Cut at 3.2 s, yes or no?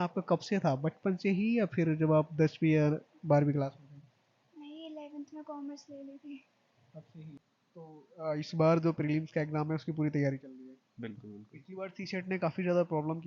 no